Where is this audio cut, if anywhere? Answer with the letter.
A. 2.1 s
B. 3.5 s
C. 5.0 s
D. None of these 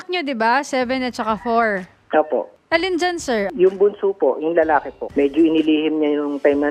C